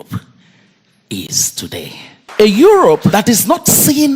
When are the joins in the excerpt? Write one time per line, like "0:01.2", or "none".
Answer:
0:02.3
0:03.1

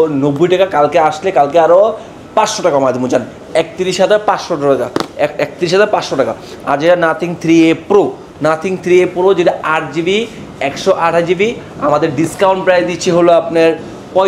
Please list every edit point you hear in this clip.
none

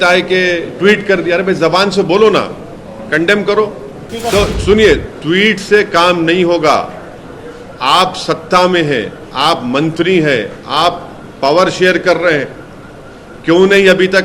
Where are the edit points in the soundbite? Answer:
0:04.0

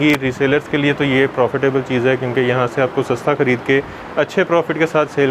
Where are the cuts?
none

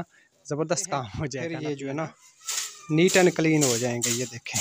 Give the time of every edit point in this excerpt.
0:01.4

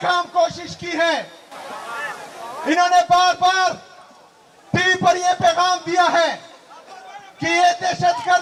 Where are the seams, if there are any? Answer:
none

